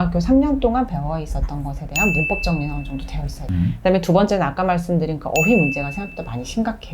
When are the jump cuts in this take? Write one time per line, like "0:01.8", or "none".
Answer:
0:03.4